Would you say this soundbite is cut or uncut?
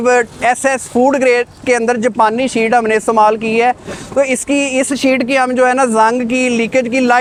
uncut